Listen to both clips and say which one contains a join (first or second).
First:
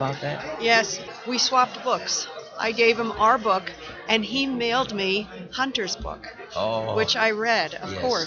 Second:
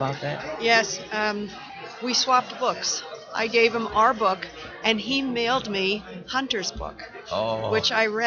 first